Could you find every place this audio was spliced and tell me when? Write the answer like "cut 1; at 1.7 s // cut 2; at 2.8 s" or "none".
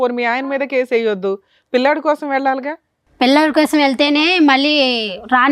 none